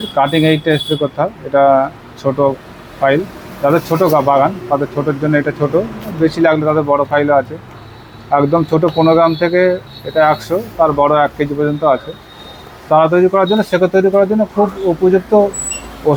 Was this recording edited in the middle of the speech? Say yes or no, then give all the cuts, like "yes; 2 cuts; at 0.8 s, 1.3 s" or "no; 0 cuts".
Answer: no; 0 cuts